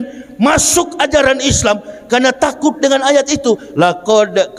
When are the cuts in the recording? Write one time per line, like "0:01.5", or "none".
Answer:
none